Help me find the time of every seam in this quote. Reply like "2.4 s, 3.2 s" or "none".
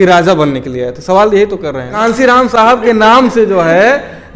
1.9 s